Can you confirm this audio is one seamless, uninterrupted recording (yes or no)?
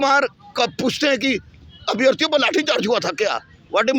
yes